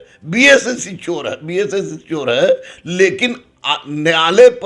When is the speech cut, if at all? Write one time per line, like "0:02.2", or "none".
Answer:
none

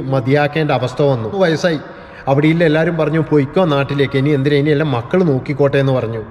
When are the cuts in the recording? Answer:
0:01.1

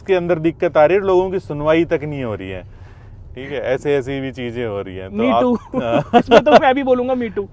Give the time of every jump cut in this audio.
none

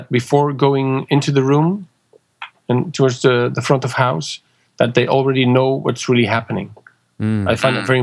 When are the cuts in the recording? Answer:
none

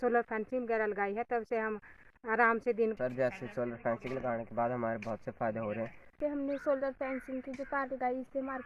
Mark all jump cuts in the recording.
0:03.0
0:06.1

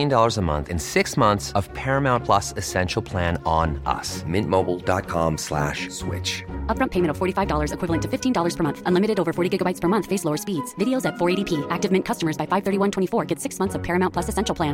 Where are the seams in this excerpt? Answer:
none

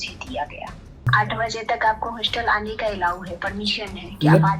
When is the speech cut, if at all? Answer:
0:01.1

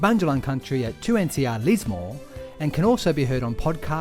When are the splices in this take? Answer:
none

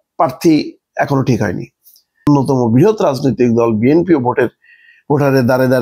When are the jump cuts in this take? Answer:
0:02.3

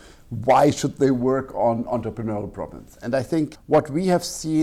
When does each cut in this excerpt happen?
none

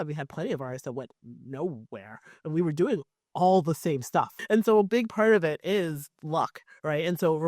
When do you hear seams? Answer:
0:04.3

